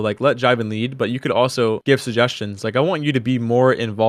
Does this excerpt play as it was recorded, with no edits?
yes; 0 cuts

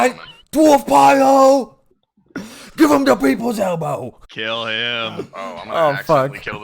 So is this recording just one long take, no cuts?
no; 2 cuts; at 1.8 s, 4.2 s

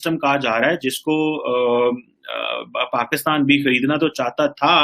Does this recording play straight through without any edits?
yes; 0 cuts

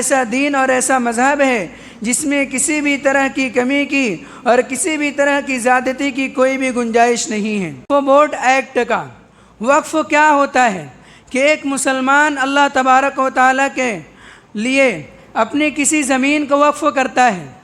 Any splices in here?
yes; 1 cut; at 7.8 s

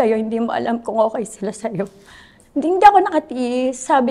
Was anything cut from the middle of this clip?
no; 0 cuts

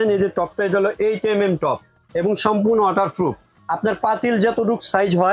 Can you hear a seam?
yes; 2 cuts; at 1.9 s, 3.5 s

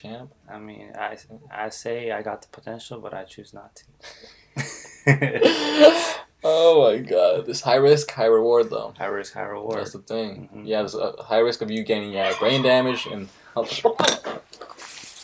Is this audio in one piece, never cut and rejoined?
yes; 0 cuts

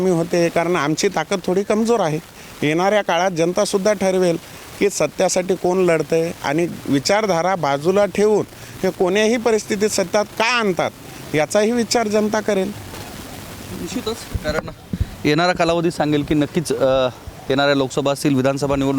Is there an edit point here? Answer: no; 0 cuts

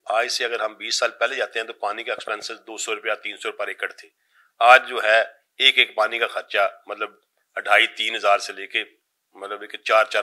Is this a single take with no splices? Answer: yes; 0 cuts

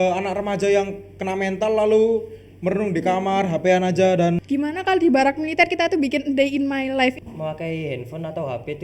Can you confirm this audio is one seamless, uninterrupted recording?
no; 2 cuts; at 4.4 s, 7.2 s

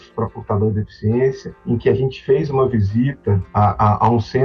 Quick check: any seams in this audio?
no; 0 cuts

